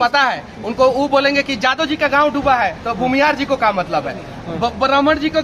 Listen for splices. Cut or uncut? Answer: uncut